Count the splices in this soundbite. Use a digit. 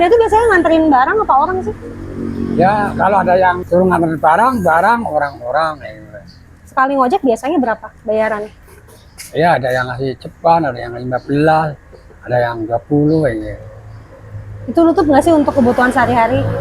1